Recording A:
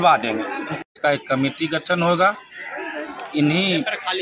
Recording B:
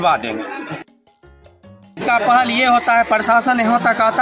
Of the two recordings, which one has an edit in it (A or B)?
A